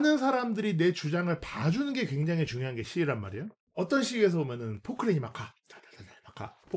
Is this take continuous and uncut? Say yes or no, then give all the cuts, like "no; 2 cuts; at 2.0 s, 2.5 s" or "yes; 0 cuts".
yes; 0 cuts